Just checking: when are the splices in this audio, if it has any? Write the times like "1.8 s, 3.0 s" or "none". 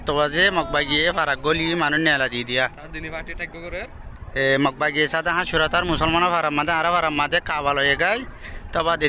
none